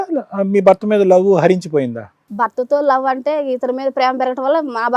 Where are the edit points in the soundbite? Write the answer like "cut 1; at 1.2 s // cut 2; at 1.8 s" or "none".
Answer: none